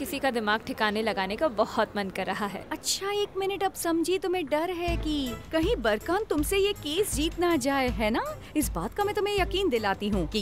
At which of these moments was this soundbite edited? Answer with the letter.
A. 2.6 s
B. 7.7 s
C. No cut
A